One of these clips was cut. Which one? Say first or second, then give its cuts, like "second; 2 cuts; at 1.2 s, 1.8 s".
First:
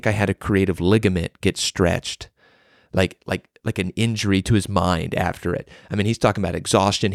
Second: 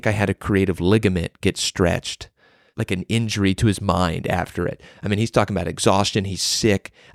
second; 1 cut; at 2.7 s